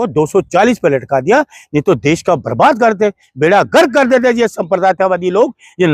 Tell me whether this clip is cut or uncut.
uncut